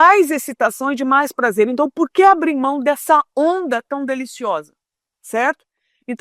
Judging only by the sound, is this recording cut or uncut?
uncut